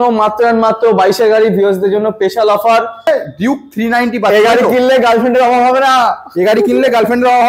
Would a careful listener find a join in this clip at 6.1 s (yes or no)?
no